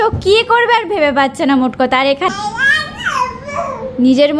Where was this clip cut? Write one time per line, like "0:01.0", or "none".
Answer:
none